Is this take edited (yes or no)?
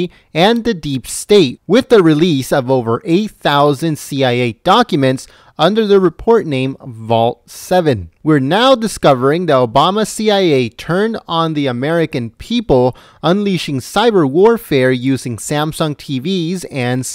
no